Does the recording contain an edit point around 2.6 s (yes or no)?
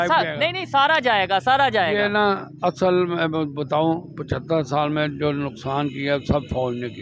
no